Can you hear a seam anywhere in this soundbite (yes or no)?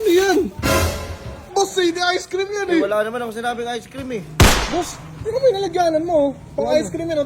yes